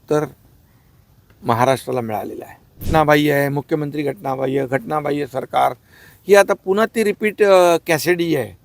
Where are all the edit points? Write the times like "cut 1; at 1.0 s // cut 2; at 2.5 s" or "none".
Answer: cut 1; at 2.9 s